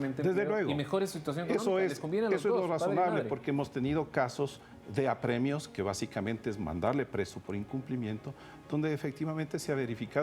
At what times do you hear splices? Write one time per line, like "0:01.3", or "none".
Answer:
none